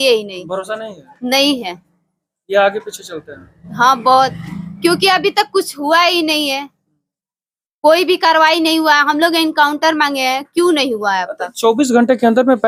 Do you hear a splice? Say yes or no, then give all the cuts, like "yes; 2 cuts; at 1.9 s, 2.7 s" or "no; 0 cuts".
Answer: no; 0 cuts